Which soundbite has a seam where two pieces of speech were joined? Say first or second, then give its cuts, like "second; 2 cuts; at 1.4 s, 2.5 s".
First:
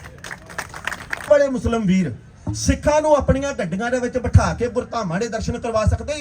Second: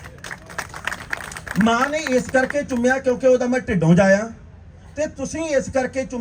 first; 1 cut; at 1.3 s